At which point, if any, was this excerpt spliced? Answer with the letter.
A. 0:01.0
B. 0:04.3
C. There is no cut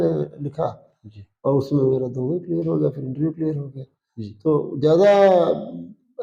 C